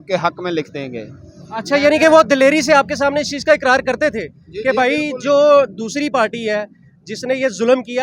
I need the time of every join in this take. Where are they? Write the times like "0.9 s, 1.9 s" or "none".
none